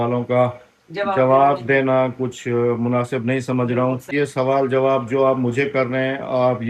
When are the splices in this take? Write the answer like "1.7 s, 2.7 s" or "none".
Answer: 4.1 s

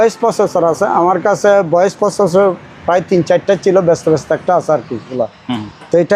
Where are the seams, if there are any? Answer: 5.1 s

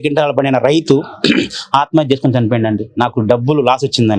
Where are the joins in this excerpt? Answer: none

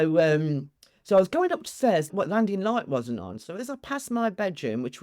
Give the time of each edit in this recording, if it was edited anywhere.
2.1 s

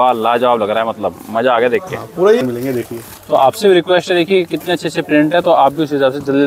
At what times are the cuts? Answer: 2.4 s

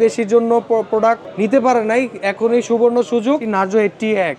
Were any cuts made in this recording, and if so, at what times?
1.3 s, 3.5 s

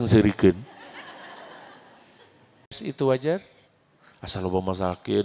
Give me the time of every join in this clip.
2.8 s

